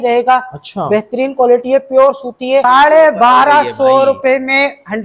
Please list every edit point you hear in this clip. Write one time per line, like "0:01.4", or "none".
0:02.6